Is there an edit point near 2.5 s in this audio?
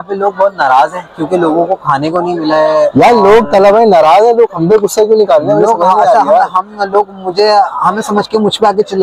no; 0 cuts

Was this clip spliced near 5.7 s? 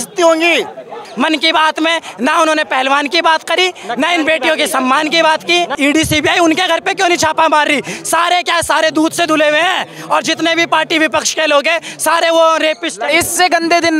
yes; 3 cuts; at 1.0 s, 5.7 s, 13.1 s

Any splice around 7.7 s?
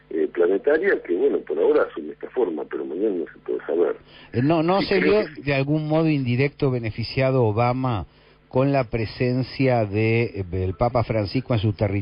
yes; 1 cut; at 7.7 s

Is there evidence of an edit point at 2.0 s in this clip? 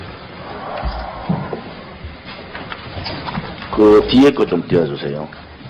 yes; 1 cut; at 2.0 s

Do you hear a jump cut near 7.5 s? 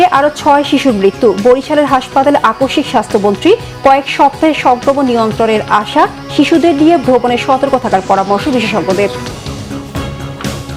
no; 1 cut; at 9.3 s

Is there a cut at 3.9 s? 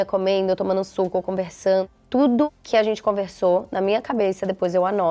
no; 2 cuts; at 1.9 s, 2.6 s

